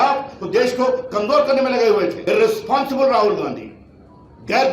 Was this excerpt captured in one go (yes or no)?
no